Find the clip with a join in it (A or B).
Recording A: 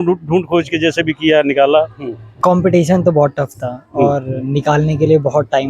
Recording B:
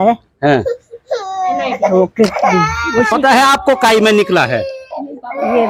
A